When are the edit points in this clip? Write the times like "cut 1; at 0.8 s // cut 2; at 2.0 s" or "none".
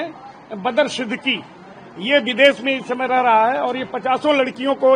none